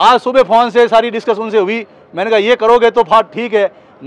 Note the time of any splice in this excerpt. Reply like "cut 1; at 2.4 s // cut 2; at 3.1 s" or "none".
none